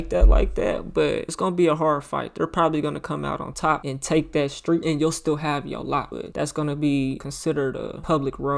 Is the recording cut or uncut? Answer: cut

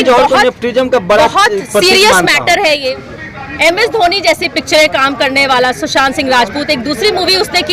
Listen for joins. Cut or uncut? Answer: cut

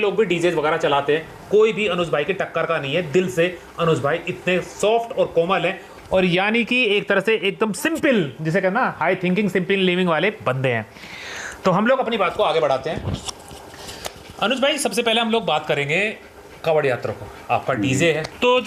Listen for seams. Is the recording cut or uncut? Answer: uncut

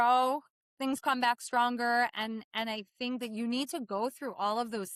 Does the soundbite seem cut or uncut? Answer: uncut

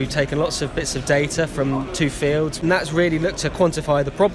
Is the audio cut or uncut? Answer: cut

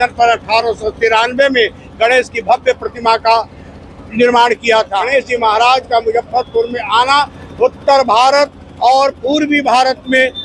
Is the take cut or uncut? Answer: cut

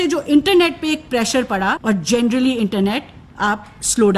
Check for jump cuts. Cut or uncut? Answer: cut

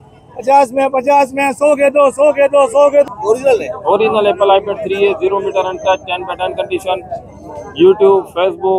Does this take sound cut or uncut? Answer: cut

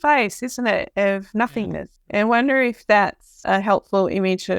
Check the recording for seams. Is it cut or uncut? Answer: cut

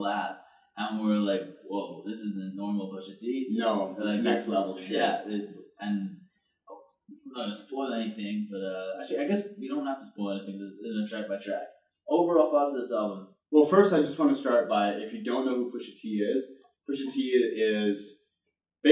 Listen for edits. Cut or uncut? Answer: cut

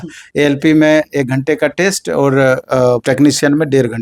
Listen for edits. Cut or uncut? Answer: cut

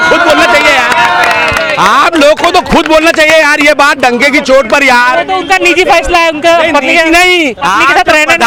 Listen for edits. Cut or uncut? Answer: uncut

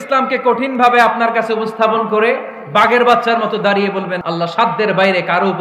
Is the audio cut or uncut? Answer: cut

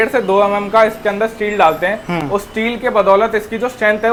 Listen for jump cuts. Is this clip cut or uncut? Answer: uncut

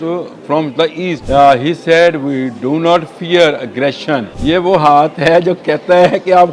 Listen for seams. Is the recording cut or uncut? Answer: cut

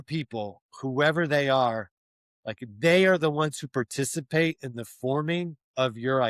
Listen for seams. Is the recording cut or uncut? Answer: uncut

